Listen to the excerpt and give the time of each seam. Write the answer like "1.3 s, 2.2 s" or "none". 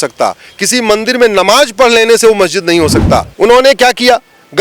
3.3 s